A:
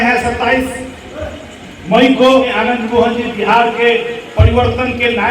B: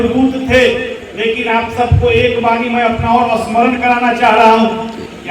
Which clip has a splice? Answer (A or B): A